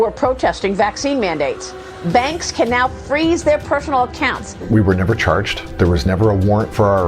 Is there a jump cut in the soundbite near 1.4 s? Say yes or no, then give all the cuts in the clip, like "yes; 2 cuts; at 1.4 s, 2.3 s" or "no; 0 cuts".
no; 2 cuts; at 4.5 s, 5.6 s